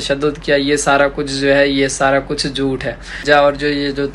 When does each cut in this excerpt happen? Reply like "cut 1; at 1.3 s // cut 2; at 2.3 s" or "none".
cut 1; at 3.2 s